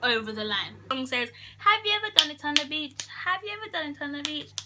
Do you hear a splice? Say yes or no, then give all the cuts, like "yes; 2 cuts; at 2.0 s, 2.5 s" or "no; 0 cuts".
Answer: yes; 1 cut; at 0.9 s